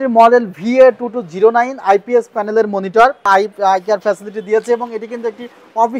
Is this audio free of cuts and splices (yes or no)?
no